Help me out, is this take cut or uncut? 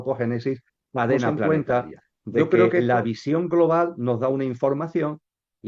cut